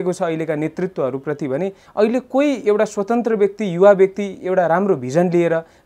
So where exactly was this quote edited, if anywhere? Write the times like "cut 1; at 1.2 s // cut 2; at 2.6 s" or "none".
none